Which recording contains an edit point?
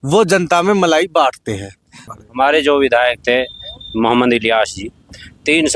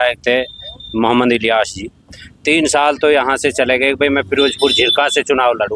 first; 1 cut; at 2.1 s

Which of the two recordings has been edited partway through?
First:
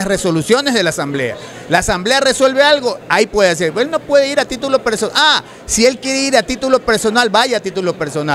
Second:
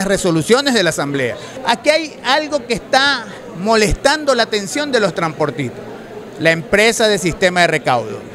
second; 1 cut; at 1.5 s

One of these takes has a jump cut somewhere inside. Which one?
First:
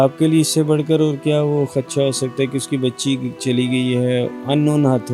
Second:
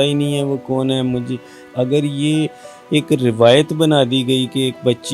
second; 1 cut; at 1.6 s

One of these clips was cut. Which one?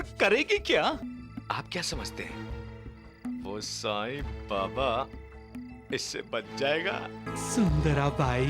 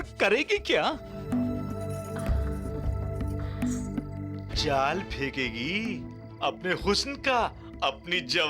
first; 2 cuts; at 1.0 s, 7.3 s

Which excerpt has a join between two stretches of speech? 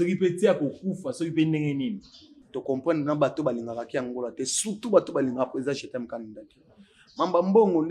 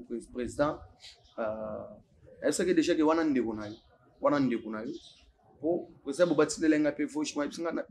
first; 1 cut; at 2.4 s

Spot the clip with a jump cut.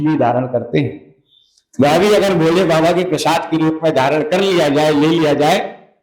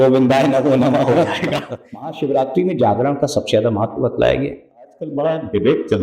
second; 2 cuts; at 2.1 s, 5.0 s

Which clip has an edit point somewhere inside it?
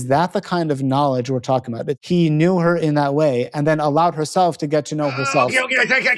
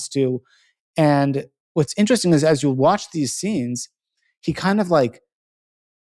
first; 1 cut; at 1.9 s

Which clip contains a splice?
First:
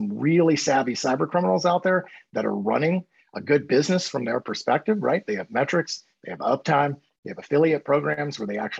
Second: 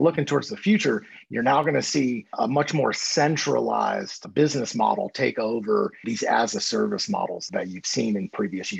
second; 1 cut; at 6.1 s

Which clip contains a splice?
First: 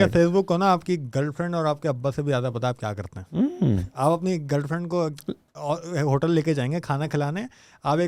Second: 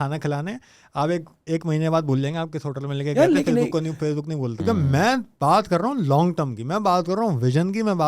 second; 1 cut; at 4.4 s

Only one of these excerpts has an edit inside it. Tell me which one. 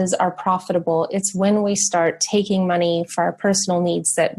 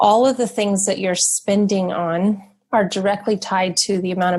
second; 1 cut; at 2.5 s

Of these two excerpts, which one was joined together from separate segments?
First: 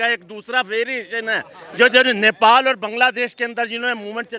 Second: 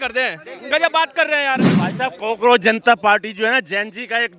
second; 1 cut; at 1.7 s

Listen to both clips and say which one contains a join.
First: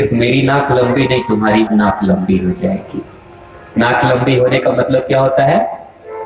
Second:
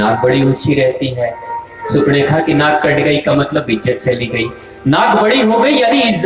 first; 1 cut; at 1.7 s

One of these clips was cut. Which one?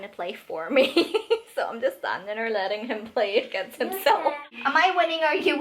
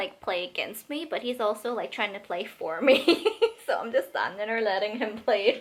first; 1 cut; at 4.5 s

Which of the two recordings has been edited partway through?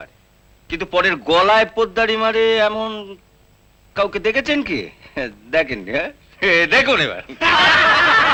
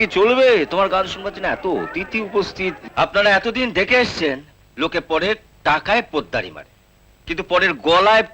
second; 1 cut; at 2.8 s

